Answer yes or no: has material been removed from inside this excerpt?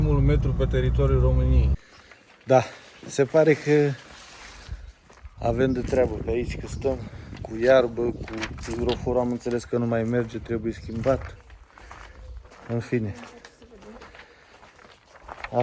yes